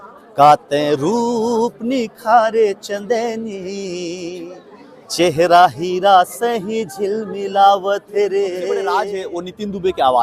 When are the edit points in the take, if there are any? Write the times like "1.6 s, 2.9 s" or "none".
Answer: 9.1 s